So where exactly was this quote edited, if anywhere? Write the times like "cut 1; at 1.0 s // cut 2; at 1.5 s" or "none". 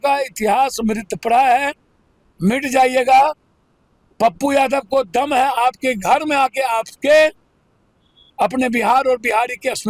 none